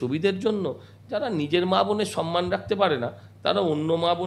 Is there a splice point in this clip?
no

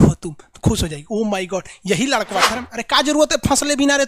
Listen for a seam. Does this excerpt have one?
yes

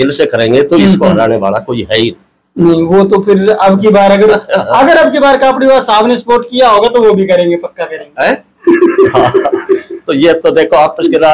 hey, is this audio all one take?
yes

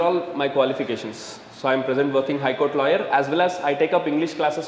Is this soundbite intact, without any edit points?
yes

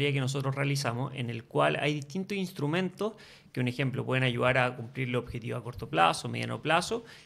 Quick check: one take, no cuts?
yes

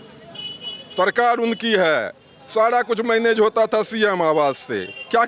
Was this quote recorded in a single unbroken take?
yes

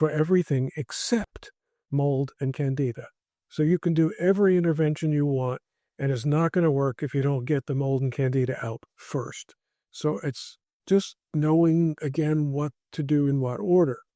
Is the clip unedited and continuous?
yes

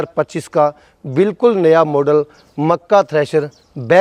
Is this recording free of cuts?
yes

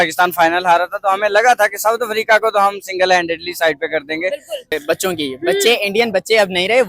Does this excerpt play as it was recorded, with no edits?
no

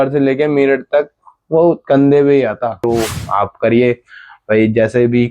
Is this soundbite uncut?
no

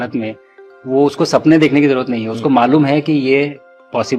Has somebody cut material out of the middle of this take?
no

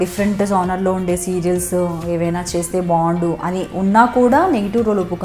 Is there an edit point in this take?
no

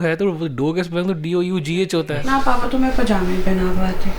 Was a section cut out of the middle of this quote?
yes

